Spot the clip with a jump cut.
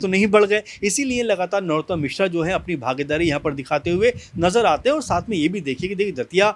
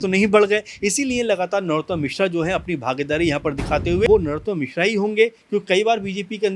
second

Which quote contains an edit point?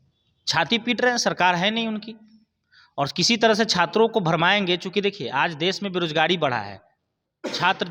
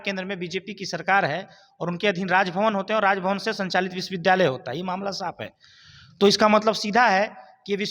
second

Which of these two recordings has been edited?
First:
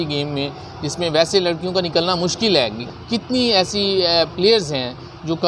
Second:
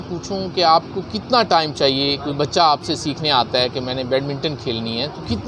first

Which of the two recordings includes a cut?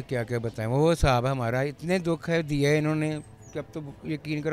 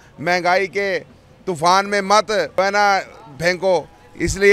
second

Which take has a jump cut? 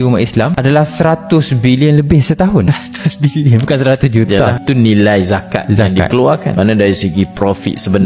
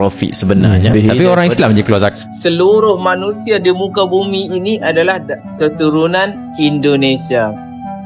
second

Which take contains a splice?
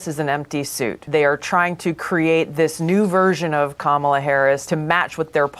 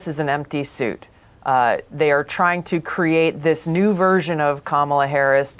first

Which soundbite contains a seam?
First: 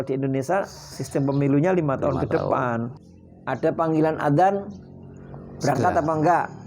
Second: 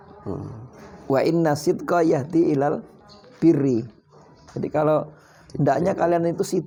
first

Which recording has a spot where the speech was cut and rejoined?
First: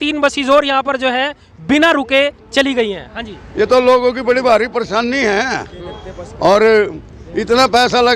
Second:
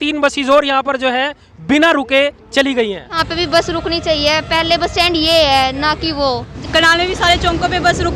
second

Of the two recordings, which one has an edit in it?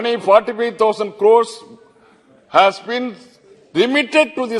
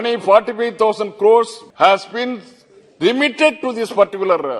second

